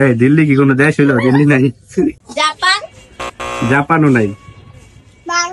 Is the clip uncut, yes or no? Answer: yes